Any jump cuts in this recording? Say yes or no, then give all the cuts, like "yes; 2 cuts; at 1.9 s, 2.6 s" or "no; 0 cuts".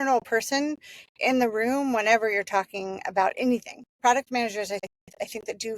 yes; 2 cuts; at 3.9 s, 4.8 s